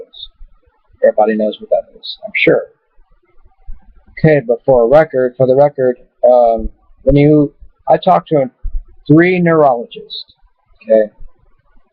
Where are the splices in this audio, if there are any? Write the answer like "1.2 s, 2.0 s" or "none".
1.8 s